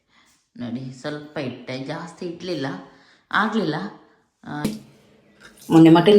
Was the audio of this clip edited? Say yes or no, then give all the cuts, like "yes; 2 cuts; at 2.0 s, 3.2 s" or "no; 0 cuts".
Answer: yes; 1 cut; at 4.7 s